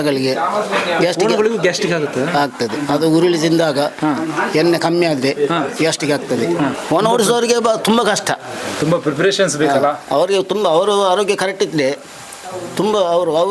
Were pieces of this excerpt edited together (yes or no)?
yes